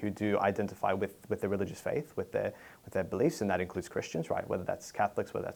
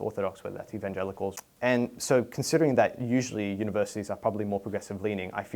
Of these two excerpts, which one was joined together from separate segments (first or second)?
second